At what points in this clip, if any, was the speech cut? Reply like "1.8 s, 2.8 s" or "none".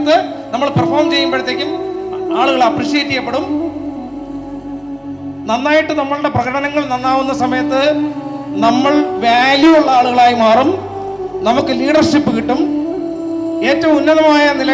none